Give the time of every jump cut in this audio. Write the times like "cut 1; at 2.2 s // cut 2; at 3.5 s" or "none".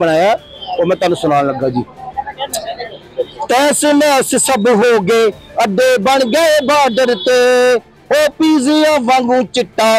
none